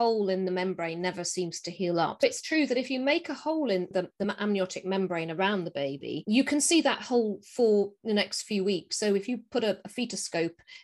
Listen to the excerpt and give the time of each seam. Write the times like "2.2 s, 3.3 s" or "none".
2.2 s, 3.9 s